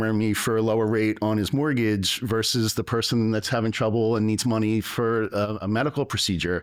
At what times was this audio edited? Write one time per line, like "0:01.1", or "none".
none